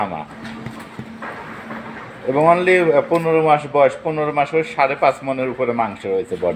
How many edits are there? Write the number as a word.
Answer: zero